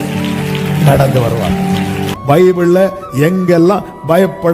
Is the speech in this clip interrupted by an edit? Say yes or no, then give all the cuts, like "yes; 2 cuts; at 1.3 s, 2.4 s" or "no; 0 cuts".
yes; 1 cut; at 2.1 s